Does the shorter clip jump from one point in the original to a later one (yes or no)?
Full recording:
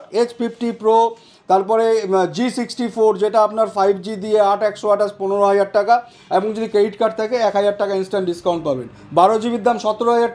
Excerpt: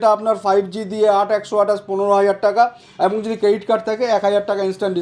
no